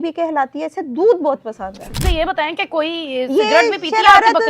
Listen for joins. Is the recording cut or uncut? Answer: cut